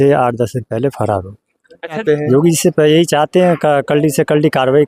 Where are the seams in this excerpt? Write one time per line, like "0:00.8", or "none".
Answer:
none